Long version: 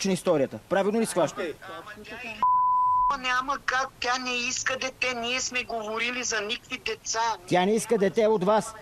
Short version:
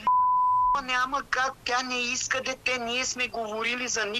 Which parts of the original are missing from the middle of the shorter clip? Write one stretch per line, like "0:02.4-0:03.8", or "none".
none